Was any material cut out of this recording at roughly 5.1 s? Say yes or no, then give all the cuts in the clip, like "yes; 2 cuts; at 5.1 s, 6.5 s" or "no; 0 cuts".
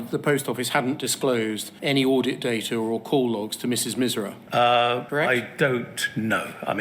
yes; 3 cuts; at 1.7 s, 4.4 s, 5.1 s